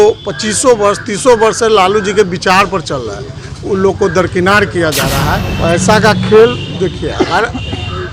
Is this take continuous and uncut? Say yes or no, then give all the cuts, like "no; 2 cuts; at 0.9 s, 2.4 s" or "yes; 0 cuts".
no; 1 cut; at 5.4 s